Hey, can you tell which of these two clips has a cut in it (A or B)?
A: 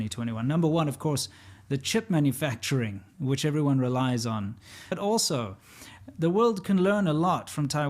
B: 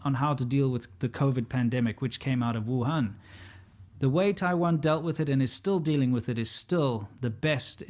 A